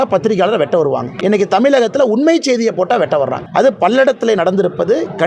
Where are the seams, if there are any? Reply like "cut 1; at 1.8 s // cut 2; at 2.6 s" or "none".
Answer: cut 1; at 1.1 s // cut 2; at 3.4 s